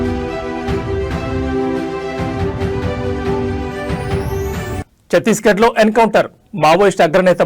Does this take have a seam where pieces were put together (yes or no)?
yes